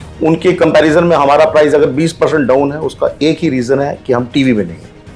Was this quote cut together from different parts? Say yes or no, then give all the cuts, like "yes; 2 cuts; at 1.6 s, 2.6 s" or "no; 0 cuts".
no; 0 cuts